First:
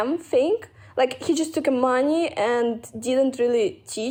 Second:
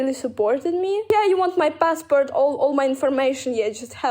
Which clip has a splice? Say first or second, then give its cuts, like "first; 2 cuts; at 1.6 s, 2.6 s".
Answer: second; 1 cut; at 1.0 s